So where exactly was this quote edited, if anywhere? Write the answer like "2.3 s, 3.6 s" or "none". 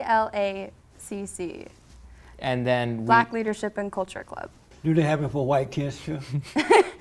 4.6 s